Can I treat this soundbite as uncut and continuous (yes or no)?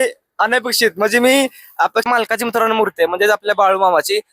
no